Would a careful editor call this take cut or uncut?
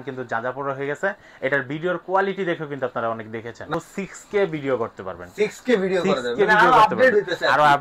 cut